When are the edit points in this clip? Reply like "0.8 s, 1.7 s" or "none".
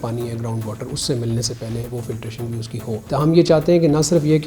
3.0 s